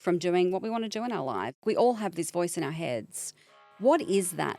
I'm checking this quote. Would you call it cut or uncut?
cut